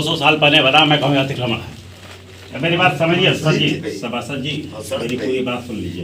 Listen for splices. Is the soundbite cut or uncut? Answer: cut